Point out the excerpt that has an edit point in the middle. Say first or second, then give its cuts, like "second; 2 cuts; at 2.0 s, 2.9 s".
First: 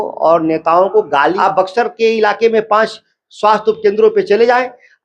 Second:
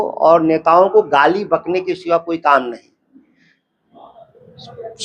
first; 1 cut; at 1.4 s